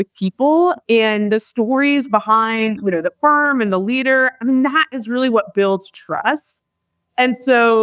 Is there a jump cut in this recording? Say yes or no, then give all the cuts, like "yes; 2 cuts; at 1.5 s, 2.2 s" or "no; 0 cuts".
no; 0 cuts